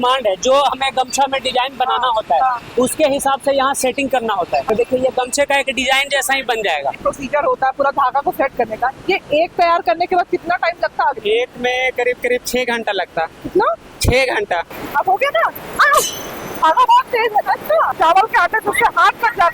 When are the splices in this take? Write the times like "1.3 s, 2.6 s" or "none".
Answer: 4.6 s, 7.0 s, 11.1 s, 14.7 s, 17.9 s